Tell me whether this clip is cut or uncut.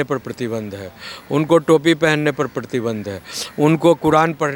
uncut